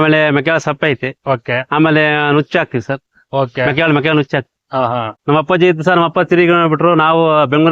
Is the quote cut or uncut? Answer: cut